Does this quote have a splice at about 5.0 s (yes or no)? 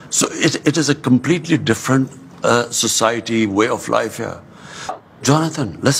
yes